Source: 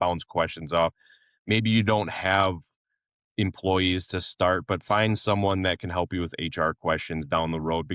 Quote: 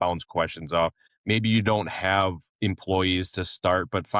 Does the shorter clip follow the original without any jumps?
no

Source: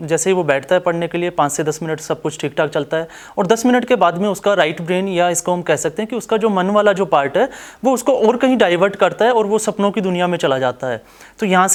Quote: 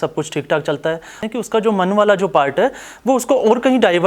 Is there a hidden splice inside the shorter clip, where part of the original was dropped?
yes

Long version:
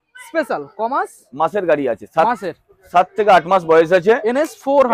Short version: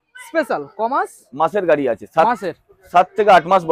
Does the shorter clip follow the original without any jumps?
yes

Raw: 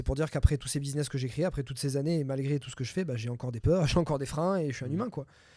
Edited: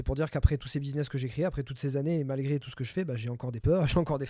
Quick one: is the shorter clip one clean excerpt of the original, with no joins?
yes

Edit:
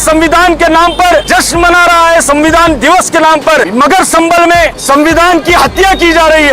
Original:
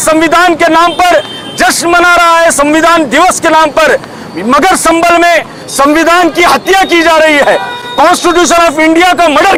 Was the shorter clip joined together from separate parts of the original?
yes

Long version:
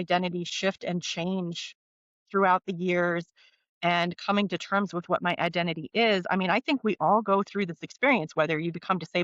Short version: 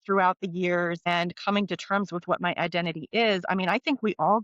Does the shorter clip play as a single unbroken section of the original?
no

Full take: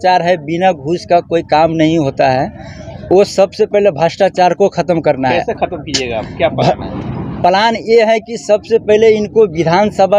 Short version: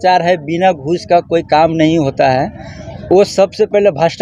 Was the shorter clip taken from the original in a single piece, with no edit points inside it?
yes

